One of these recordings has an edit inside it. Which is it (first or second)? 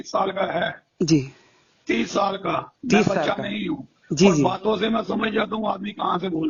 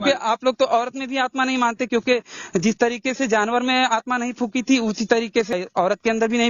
second